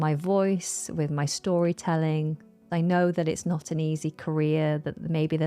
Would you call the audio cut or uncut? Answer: cut